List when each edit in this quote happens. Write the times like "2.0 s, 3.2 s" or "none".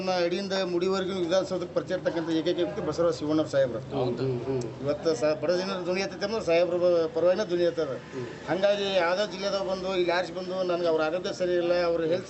none